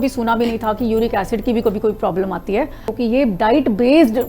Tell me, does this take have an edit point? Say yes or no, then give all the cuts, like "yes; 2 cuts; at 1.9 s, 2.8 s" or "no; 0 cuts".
yes; 1 cut; at 2.9 s